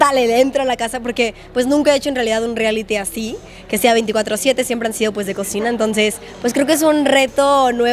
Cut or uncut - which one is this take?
uncut